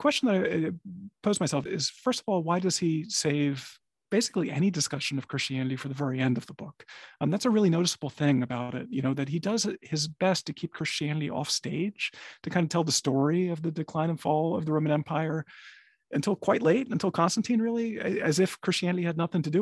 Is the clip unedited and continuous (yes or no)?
no